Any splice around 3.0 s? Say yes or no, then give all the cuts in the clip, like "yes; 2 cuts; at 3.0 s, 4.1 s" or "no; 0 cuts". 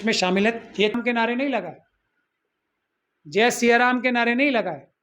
no; 1 cut; at 1.0 s